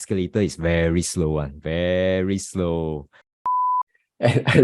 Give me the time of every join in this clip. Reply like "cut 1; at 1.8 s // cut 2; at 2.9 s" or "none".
cut 1; at 3.5 s